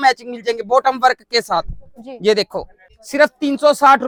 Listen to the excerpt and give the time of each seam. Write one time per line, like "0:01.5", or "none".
none